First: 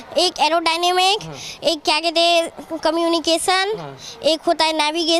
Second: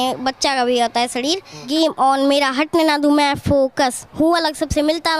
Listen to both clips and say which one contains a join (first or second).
second